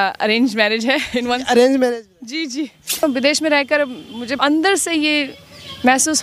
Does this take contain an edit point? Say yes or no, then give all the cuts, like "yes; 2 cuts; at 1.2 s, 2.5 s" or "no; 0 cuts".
yes; 2 cuts; at 3.0 s, 4.4 s